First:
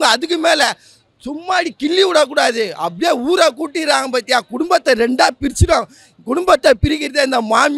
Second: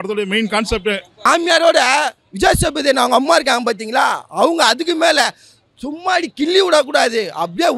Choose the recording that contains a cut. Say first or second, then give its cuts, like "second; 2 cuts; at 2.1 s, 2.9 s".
second; 1 cut; at 1.2 s